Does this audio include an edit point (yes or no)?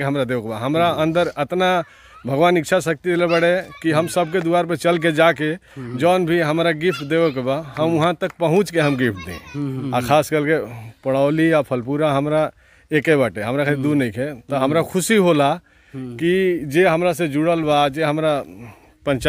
yes